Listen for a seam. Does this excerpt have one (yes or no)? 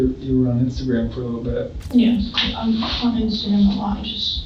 yes